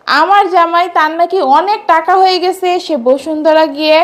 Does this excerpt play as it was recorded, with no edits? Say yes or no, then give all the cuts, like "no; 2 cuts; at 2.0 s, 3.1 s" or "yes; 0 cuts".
yes; 0 cuts